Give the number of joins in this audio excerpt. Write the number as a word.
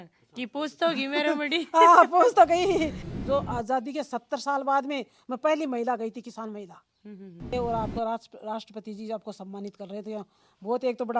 two